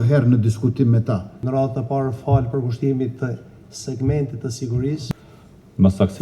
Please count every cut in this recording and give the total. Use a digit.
2